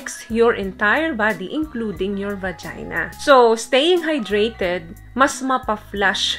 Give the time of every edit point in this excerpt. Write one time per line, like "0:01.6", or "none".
0:03.1